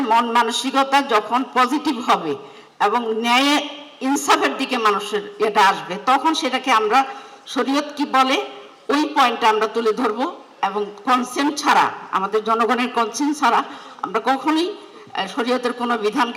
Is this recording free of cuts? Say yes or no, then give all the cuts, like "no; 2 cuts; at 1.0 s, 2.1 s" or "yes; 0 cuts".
yes; 0 cuts